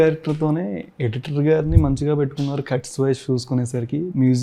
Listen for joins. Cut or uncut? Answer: uncut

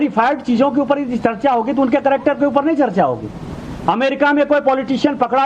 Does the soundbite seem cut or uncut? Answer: cut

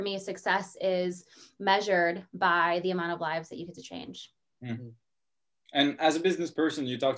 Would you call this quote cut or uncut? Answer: uncut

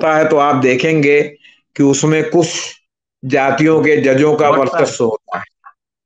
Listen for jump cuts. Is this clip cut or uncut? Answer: uncut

